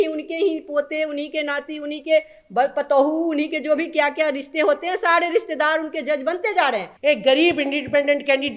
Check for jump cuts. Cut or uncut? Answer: cut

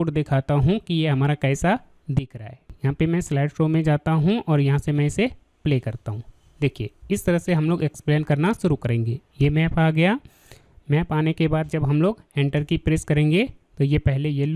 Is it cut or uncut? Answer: cut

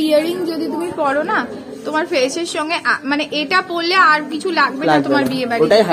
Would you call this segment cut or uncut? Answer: uncut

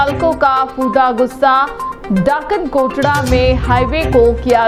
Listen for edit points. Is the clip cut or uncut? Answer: uncut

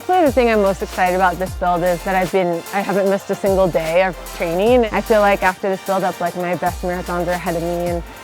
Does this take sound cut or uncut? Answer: cut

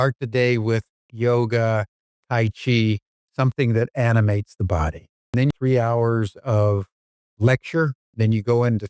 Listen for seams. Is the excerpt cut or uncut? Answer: cut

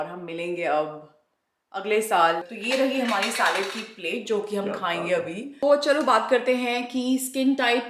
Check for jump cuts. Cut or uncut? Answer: cut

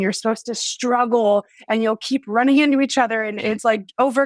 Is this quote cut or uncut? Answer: uncut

